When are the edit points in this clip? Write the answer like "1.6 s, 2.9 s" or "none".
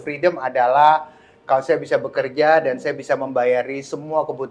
none

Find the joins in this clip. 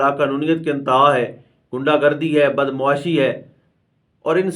none

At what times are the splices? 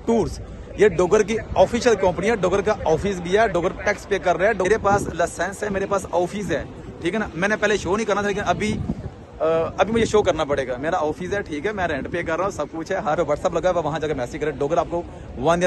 4.7 s, 13.2 s

